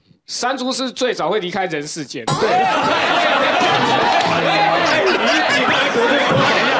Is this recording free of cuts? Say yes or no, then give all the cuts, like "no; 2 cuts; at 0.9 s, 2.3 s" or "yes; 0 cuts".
yes; 0 cuts